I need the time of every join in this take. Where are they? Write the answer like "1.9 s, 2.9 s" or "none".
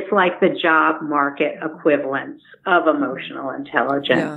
none